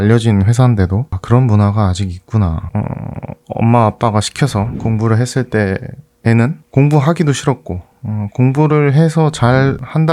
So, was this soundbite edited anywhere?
yes; 1 cut; at 2.6 s

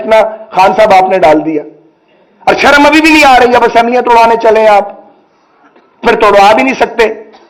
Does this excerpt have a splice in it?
no; 0 cuts

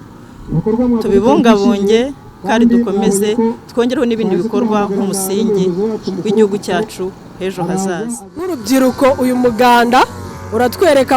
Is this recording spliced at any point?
yes; 1 cut; at 8.5 s

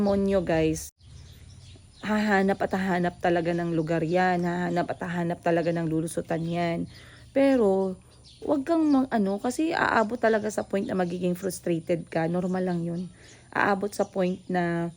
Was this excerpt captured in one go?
no; 1 cut; at 1.0 s

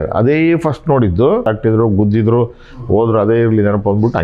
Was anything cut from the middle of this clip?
yes; 1 cut; at 1.4 s

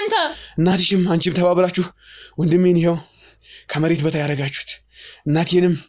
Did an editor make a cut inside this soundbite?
no; 0 cuts

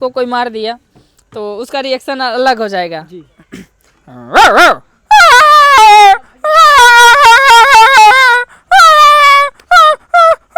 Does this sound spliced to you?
no; 0 cuts

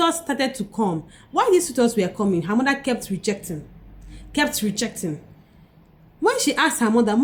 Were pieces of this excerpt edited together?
no; 0 cuts

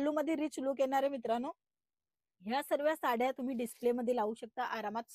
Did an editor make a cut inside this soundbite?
no; 0 cuts

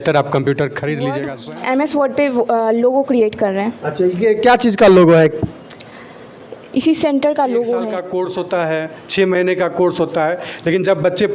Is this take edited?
yes; 2 cuts; at 1.3 s, 8.0 s

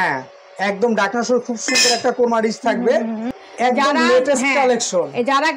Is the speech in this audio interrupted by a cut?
yes; 1 cut; at 3.4 s

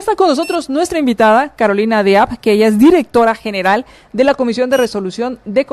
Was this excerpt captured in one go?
yes; 0 cuts

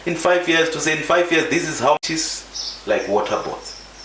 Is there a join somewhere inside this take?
yes; 1 cut; at 2.0 s

